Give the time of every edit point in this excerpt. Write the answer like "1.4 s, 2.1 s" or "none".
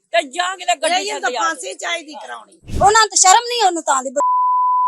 2.7 s

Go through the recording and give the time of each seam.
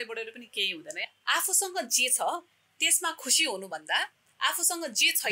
0.9 s

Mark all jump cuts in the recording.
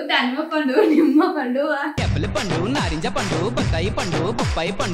none

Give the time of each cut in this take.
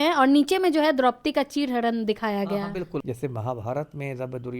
3.0 s

